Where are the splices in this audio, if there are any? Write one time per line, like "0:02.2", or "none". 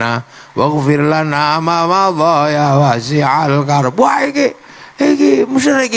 none

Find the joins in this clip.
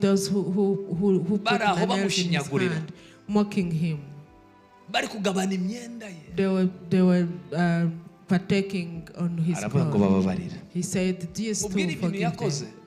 none

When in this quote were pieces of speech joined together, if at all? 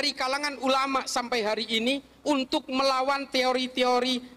none

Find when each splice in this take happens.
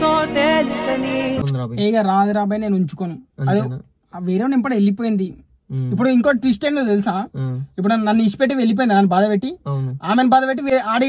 0:01.4

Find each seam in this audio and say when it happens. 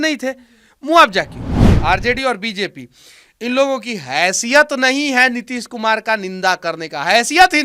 0:01.7

